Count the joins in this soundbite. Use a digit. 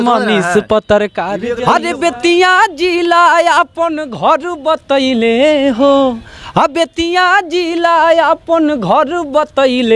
1